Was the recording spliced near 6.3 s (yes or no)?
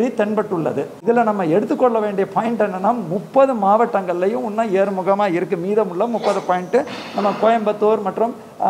no